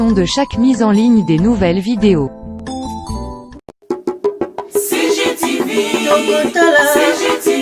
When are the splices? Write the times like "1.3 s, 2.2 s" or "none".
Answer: none

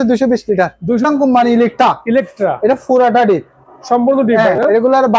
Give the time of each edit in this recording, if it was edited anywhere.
1.0 s

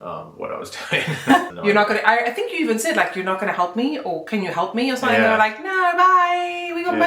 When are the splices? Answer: 1.5 s

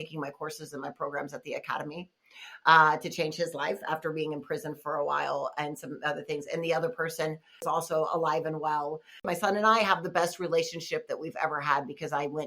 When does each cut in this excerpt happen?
7.6 s, 9.3 s

